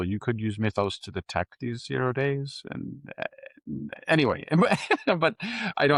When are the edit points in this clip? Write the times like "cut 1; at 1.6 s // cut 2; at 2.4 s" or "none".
none

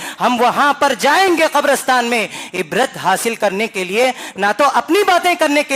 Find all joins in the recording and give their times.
none

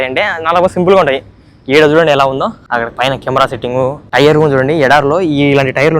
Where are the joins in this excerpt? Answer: cut 1; at 2.6 s // cut 2; at 4.0 s

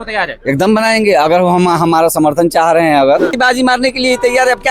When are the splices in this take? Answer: cut 1; at 3.3 s

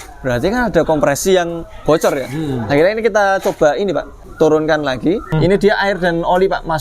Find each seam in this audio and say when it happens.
cut 1; at 4.2 s // cut 2; at 5.3 s

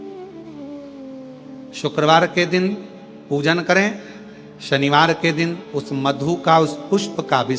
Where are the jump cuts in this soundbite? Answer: cut 1; at 1.7 s

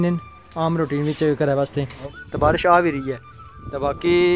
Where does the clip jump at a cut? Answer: cut 1; at 2.1 s

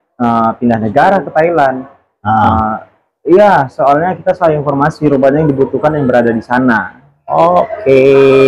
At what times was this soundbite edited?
none

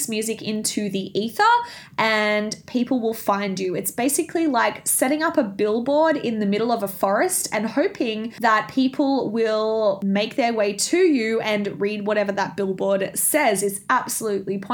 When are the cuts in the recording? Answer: cut 1; at 8.3 s // cut 2; at 10.0 s

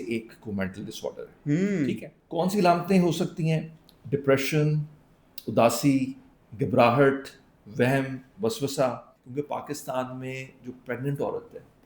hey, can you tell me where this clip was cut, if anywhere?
cut 1; at 2.1 s // cut 2; at 9.1 s

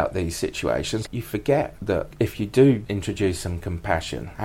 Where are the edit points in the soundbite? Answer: cut 1; at 1.0 s // cut 2; at 2.1 s // cut 3; at 2.8 s

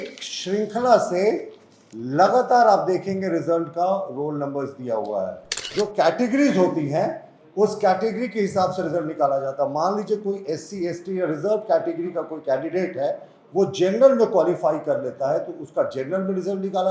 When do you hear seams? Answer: cut 1; at 5.7 s

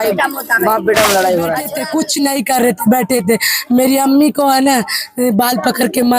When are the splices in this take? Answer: cut 1; at 1.7 s

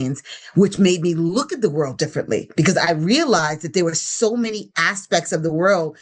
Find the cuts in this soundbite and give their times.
none

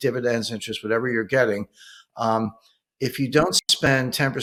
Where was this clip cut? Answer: none

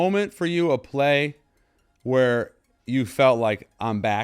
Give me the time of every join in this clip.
none

